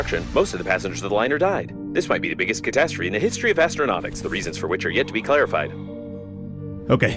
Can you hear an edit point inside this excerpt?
no; 0 cuts

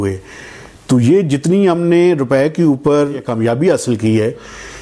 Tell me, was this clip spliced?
yes; 1 cut; at 3.3 s

